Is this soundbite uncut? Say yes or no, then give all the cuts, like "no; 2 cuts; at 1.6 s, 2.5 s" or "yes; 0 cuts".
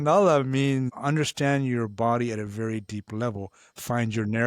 no; 1 cut; at 0.9 s